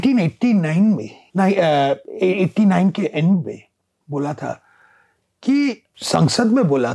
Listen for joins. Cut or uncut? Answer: cut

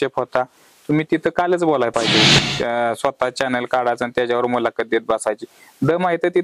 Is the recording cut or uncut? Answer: cut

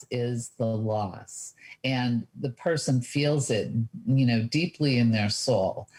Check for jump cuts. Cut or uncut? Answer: uncut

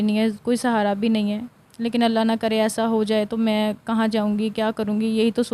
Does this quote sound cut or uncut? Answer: uncut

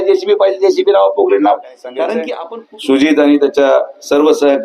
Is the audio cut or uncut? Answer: cut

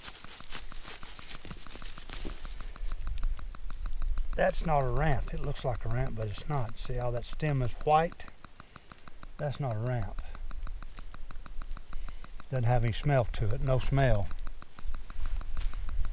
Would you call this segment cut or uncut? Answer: uncut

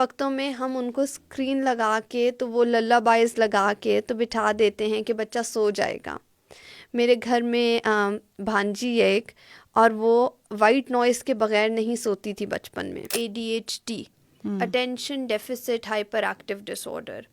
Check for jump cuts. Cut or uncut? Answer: cut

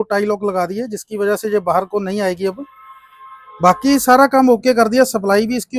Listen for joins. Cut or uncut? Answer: uncut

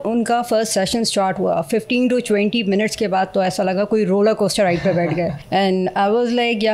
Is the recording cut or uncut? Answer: cut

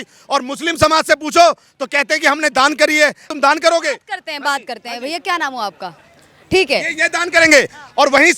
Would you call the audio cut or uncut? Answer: uncut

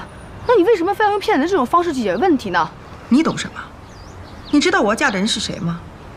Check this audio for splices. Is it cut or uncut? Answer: uncut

